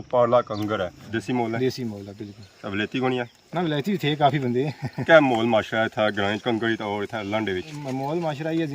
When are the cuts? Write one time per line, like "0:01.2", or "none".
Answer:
0:01.0
0:05.0
0:07.8